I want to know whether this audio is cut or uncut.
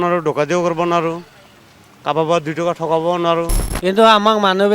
cut